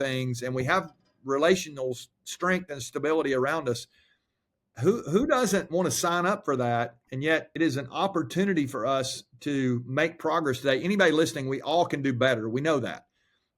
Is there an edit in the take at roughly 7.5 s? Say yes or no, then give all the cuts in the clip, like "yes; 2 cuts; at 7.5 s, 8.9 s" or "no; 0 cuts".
yes; 1 cut; at 7.5 s